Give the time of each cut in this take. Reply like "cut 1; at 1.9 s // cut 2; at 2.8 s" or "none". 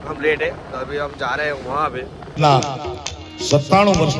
cut 1; at 2.3 s